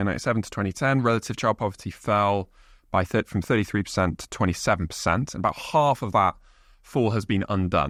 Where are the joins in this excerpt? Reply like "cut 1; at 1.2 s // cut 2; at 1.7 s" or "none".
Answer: none